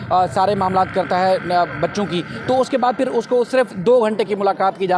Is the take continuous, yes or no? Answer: yes